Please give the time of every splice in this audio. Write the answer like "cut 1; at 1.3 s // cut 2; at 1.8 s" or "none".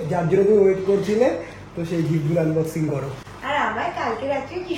none